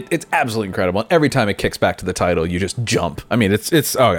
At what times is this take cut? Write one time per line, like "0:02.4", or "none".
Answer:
none